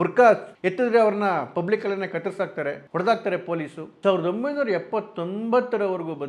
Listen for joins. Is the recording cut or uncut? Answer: cut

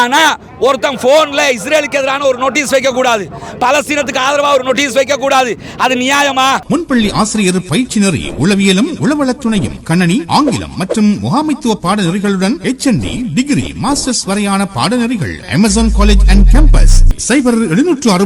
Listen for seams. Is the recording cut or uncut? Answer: cut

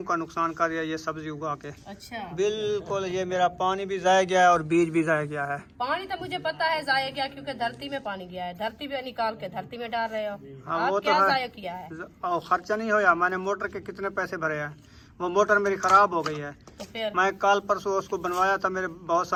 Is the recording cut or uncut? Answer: uncut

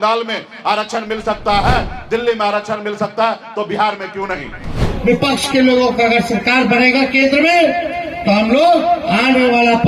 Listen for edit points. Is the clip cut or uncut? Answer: cut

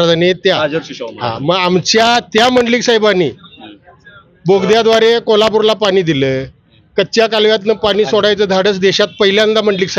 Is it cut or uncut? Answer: uncut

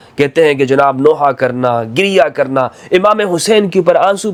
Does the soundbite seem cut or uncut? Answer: uncut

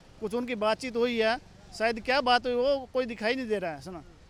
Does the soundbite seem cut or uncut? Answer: uncut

